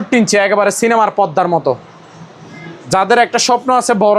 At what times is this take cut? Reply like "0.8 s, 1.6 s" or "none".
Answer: none